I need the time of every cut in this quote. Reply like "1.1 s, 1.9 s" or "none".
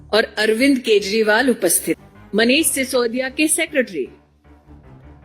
2.1 s

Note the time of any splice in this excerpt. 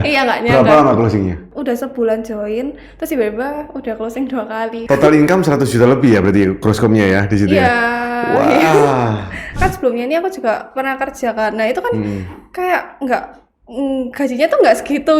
1.5 s, 4.8 s, 9.5 s

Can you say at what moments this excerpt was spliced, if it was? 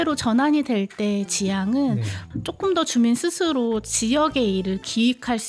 2.2 s

